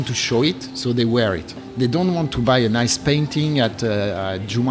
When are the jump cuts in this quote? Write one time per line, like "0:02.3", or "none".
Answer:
0:01.6
0:03.7